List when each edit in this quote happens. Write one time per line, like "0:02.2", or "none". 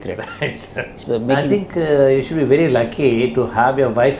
0:01.0